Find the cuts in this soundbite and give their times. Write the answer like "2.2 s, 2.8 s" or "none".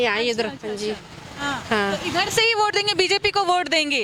none